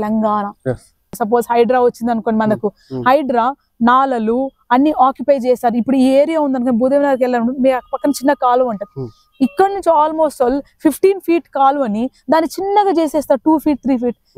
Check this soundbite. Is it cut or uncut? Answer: cut